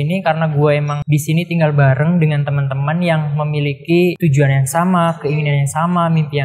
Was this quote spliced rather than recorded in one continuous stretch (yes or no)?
yes